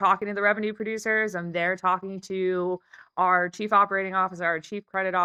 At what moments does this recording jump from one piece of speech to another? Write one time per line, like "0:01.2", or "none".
none